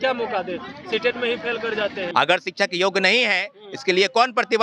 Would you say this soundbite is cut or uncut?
cut